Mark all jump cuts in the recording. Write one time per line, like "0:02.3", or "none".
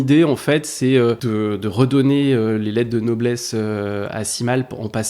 0:01.2